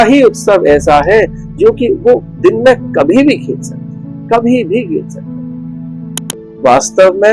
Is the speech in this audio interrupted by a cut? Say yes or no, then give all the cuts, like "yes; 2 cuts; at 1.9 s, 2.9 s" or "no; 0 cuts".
yes; 1 cut; at 6.3 s